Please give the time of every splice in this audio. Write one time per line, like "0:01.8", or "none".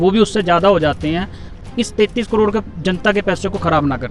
0:01.5